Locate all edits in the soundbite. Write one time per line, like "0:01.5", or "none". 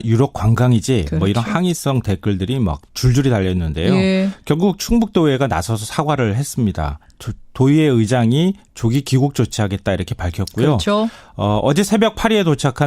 0:10.8